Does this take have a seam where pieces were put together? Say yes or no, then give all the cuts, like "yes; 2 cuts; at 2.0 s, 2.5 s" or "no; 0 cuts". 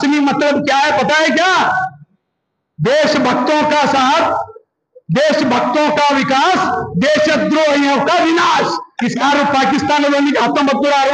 yes; 1 cut; at 9.2 s